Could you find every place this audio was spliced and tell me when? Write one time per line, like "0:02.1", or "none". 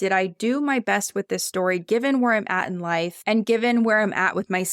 0:03.2